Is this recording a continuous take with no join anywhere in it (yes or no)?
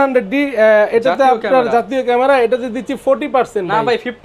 yes